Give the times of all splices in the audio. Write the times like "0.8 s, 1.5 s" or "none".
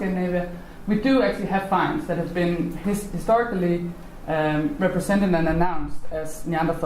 1.9 s